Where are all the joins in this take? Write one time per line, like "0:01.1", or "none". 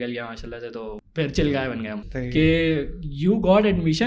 0:01.0
0:02.0